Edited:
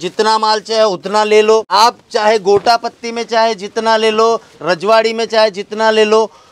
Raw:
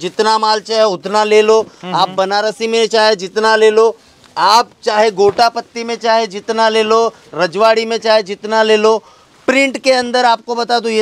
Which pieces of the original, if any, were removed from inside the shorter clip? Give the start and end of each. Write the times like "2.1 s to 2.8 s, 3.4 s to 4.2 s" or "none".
1.7 s to 4.4 s